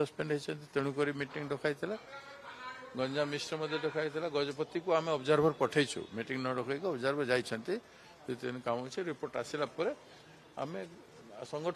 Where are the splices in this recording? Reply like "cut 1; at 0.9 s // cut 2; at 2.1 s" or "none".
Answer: none